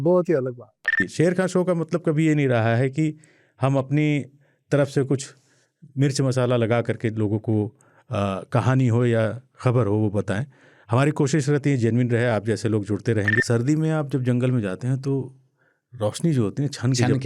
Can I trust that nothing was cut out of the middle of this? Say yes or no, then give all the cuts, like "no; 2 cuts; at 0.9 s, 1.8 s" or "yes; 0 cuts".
no; 2 cuts; at 1.1 s, 13.4 s